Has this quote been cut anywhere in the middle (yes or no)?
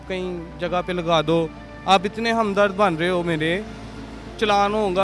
no